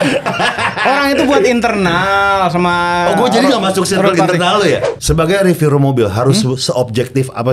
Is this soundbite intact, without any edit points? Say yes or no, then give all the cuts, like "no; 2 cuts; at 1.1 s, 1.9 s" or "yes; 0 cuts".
no; 1 cut; at 4.9 s